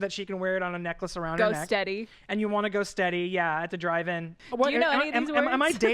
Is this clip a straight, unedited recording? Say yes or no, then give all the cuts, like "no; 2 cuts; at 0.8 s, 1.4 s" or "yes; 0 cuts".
no; 1 cut; at 4.3 s